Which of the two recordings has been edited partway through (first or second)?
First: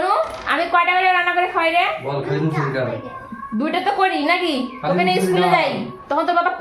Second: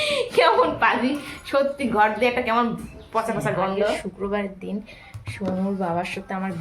second